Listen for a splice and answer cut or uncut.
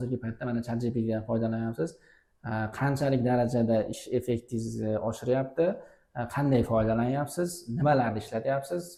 uncut